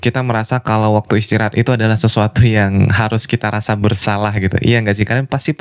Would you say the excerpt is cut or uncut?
uncut